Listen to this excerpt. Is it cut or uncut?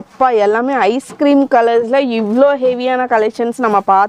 uncut